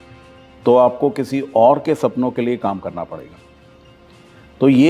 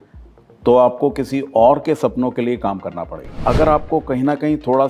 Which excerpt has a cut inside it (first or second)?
second